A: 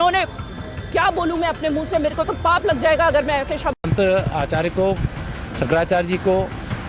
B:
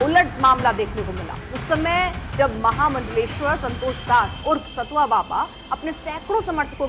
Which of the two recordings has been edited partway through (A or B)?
A